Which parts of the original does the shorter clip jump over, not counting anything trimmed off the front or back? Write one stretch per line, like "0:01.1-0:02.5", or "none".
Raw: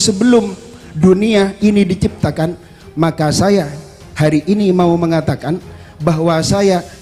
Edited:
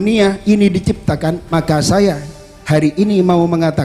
0:02.6-0:03.0